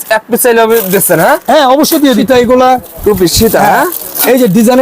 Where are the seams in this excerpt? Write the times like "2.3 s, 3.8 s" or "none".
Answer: 2.2 s